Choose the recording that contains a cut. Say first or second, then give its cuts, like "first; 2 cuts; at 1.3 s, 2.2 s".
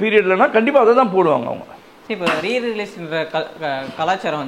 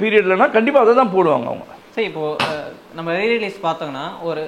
second; 1 cut; at 1.8 s